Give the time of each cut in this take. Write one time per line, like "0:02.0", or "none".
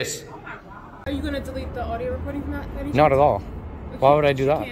0:01.0